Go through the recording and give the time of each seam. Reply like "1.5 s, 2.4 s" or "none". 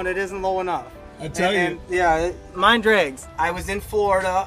3.2 s